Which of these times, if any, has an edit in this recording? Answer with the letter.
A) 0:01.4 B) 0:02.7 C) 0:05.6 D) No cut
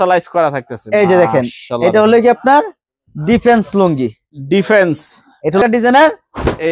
C